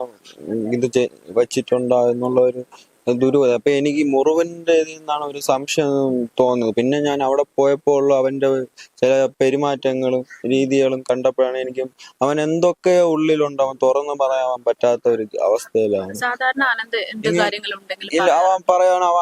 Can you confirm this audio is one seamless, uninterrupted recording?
yes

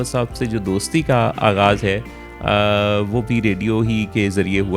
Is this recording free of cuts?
yes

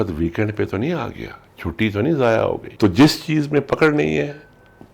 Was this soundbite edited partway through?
yes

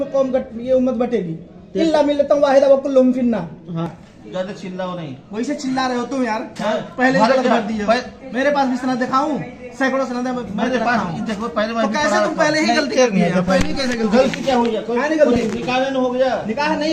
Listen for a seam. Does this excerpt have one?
yes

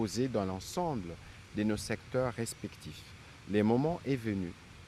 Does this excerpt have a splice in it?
yes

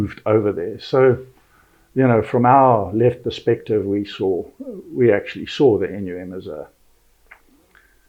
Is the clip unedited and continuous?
yes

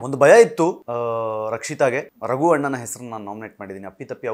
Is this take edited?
yes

